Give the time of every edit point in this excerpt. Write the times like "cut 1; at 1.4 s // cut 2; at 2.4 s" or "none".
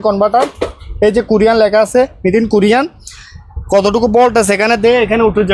none